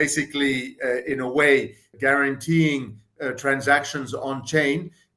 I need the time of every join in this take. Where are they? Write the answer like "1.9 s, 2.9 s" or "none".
1.9 s

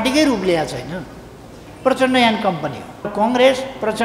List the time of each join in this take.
3.1 s

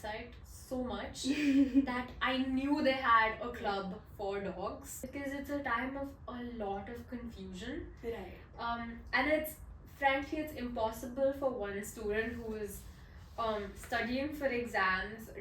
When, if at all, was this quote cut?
5.0 s

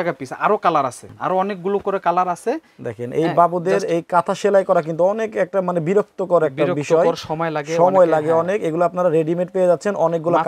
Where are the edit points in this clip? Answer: 1.1 s

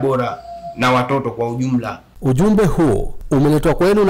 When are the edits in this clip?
2.0 s

